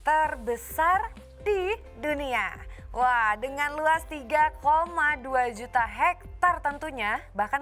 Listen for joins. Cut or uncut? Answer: uncut